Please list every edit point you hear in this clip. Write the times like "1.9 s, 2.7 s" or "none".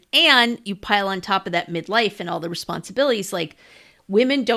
none